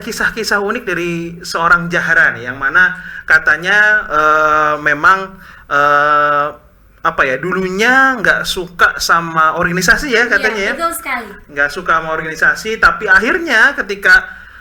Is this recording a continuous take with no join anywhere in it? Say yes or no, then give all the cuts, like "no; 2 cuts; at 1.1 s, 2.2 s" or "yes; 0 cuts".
yes; 0 cuts